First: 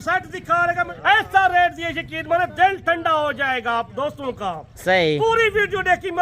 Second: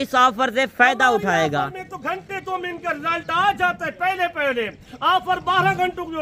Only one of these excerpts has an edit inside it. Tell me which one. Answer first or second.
first